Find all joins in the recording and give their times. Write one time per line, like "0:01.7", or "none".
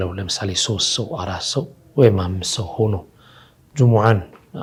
none